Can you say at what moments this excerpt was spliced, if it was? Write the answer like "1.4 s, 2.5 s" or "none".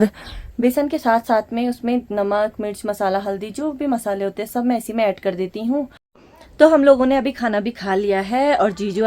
6.0 s

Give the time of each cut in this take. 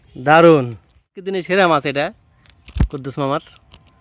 1.2 s

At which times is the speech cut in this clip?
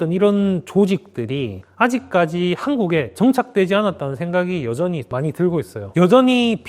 none

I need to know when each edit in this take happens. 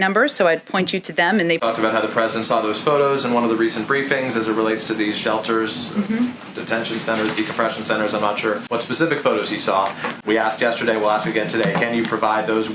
1.6 s

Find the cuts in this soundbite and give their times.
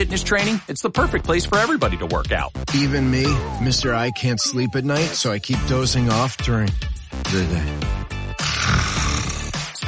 none

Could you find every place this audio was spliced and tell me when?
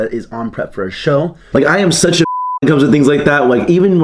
1.4 s

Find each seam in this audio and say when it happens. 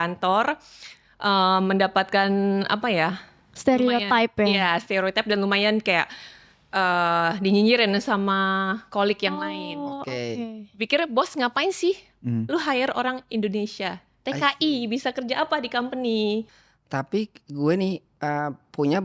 16.5 s

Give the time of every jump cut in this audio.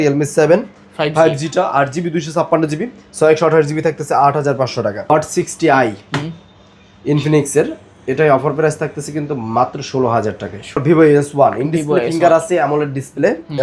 5.1 s, 10.8 s

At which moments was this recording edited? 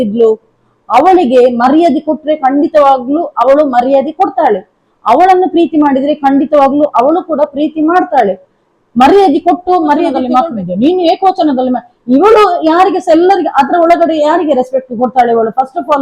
10.2 s

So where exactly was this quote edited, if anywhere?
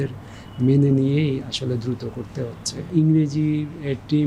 none

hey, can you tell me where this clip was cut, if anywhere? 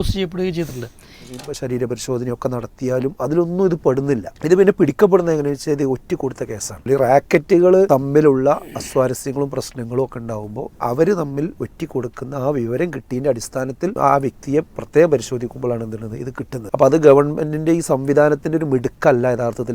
1.4 s, 4.3 s, 6.8 s, 7.9 s, 11.6 s, 13.9 s, 16.6 s

